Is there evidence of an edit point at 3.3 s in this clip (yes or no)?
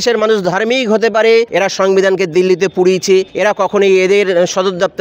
yes